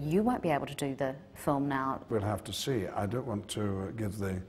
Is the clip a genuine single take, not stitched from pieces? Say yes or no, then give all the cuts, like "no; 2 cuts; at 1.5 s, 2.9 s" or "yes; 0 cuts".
no; 1 cut; at 2.1 s